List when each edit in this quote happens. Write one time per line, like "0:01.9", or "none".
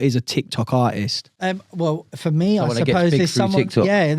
none